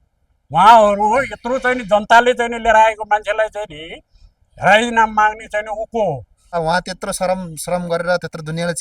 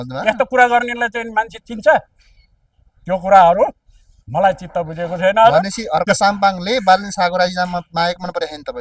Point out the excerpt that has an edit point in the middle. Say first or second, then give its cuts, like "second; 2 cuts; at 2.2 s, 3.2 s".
first; 1 cut; at 6.4 s